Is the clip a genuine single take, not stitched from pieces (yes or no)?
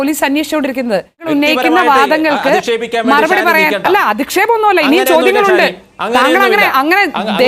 no